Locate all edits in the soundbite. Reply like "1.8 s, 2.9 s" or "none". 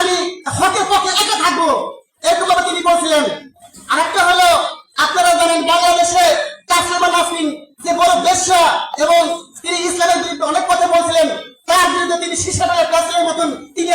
none